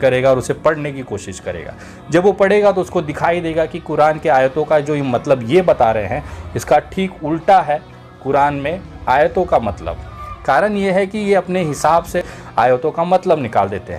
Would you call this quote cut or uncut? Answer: uncut